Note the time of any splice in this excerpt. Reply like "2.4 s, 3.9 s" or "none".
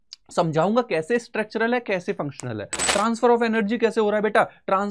2.8 s